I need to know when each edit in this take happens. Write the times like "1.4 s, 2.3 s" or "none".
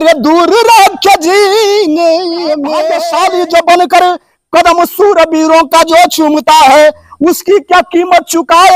2.9 s